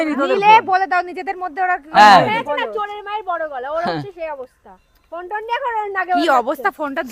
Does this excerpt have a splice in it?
no; 0 cuts

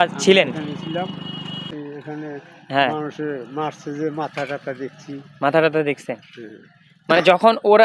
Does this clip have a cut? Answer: yes; 1 cut; at 1.7 s

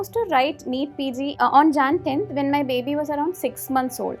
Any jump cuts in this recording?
yes; 1 cut; at 1.3 s

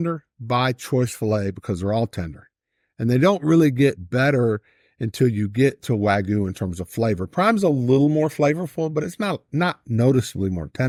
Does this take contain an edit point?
no; 0 cuts

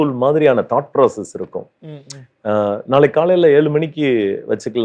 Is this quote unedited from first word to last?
yes; 0 cuts

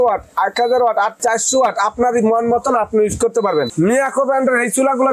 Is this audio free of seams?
no; 2 cuts; at 1.1 s, 3.7 s

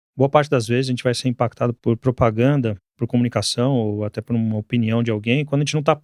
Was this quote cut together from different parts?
yes; 2 cuts; at 1.8 s, 3.0 s

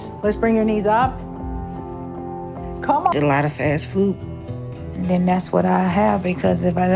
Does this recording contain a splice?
no; 0 cuts

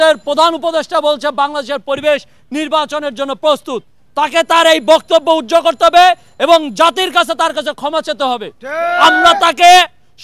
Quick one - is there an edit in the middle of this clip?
yes; 1 cut; at 3.9 s

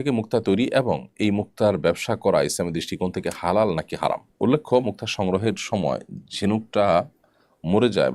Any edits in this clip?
no; 0 cuts

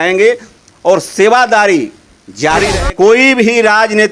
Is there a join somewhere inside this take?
yes; 1 cut; at 2.7 s

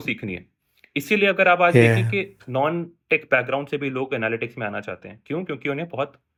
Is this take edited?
no; 0 cuts

